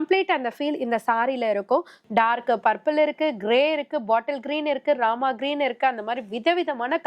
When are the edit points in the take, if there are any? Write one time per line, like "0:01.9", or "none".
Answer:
0:02.0